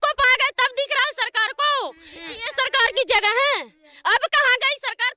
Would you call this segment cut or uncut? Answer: uncut